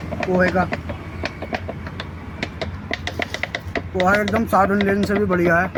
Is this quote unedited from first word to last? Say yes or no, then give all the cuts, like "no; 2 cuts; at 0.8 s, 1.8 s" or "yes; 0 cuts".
yes; 0 cuts